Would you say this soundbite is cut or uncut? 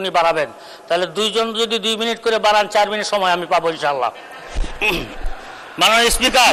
uncut